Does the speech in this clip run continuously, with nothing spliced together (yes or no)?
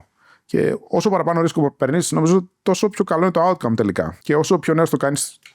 no